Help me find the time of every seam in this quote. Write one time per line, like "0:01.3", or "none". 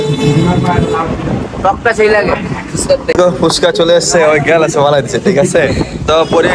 0:03.1